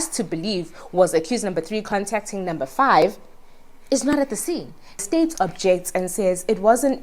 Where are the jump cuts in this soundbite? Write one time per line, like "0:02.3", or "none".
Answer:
0:05.0